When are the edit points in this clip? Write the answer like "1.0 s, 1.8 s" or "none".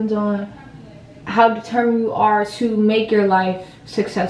none